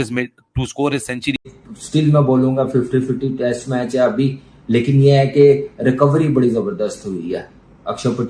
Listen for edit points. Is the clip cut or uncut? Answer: cut